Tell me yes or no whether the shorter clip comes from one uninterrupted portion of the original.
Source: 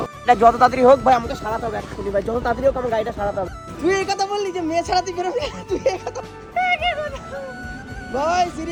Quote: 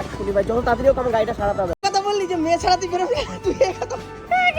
no